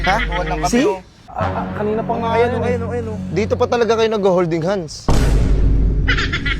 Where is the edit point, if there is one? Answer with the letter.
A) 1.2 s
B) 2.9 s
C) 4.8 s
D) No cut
A